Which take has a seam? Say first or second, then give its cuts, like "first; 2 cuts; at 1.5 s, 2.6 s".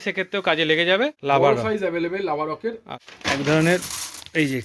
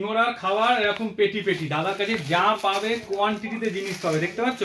first; 2 cuts; at 1.2 s, 2.6 s